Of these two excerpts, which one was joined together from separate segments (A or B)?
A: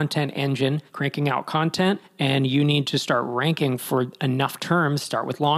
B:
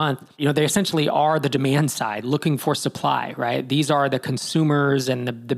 A